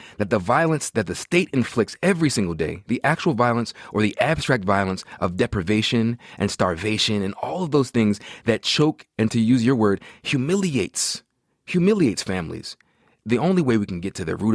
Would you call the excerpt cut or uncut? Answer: cut